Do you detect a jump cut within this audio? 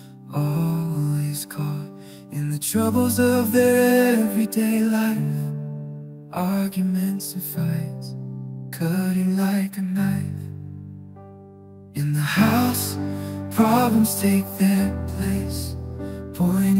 yes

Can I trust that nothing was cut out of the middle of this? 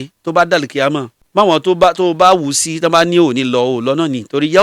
no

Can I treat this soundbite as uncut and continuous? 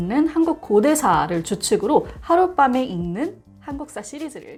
yes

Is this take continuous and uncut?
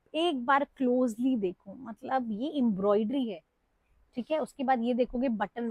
yes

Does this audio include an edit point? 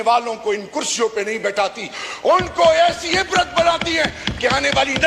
no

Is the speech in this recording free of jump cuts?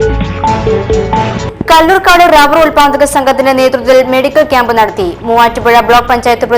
yes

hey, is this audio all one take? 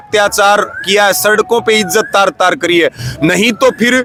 yes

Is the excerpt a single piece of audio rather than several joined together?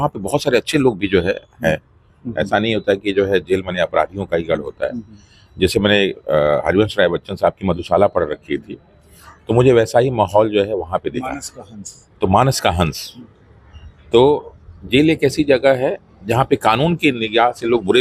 yes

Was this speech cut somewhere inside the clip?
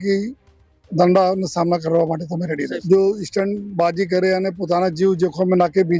yes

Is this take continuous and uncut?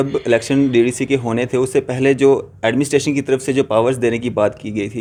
yes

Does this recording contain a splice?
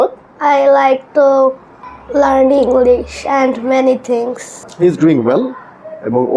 yes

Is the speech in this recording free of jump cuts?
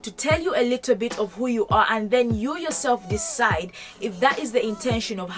yes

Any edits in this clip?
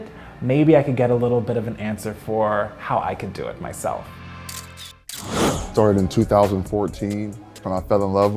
yes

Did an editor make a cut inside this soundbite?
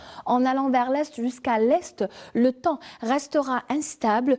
yes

